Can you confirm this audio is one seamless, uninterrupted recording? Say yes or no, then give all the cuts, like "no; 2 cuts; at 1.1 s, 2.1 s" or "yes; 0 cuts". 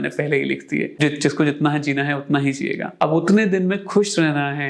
no; 2 cuts; at 0.9 s, 2.9 s